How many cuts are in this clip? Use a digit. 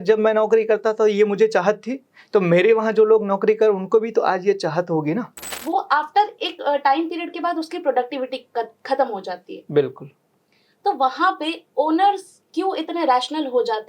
1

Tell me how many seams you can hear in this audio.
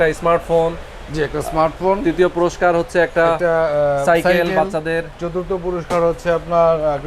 0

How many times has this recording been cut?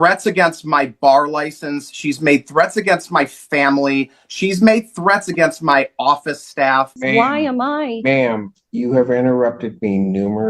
1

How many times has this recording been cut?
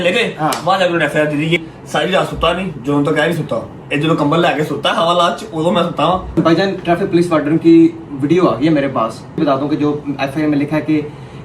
3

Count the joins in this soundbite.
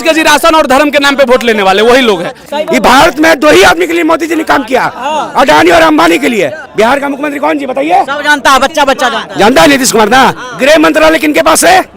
2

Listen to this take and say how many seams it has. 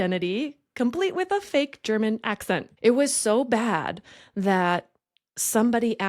1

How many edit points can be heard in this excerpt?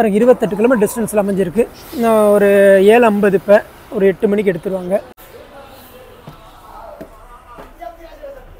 1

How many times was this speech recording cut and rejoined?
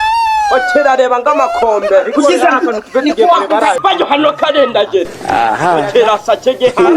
1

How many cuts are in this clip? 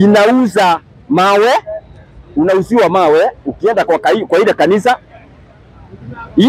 0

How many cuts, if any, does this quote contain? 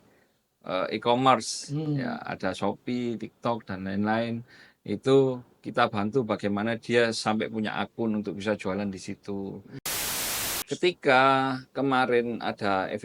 1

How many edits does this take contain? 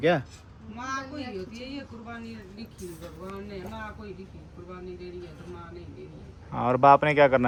0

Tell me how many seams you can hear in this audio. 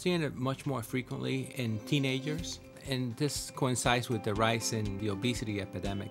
3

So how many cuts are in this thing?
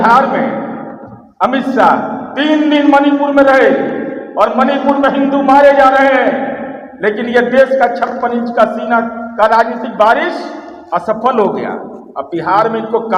0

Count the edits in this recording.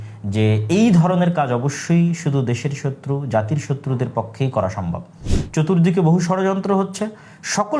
1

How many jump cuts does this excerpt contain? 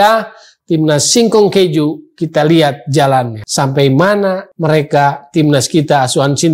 2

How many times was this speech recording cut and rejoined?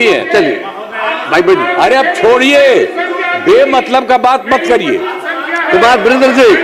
0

